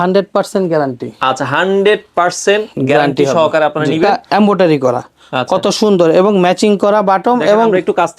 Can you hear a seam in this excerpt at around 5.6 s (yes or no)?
no